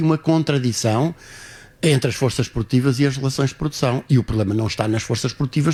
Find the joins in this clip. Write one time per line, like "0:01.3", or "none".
none